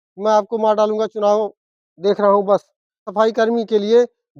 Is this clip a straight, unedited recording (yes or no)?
no